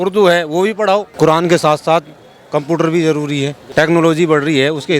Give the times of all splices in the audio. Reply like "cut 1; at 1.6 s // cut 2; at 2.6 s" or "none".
cut 1; at 1.1 s // cut 2; at 3.6 s